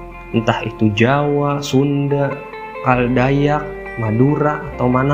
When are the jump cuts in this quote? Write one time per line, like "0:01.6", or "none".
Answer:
none